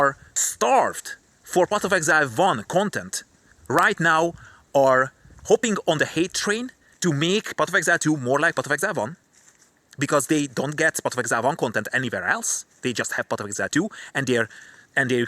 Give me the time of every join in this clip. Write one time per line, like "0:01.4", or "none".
none